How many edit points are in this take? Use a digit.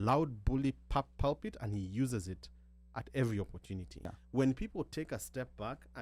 1